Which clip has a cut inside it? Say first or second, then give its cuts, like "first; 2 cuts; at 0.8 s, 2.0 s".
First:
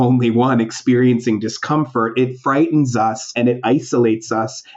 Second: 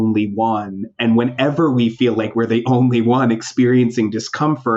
first; 1 cut; at 3.2 s